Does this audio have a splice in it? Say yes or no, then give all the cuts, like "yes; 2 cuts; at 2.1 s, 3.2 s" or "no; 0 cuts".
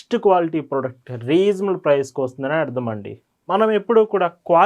no; 0 cuts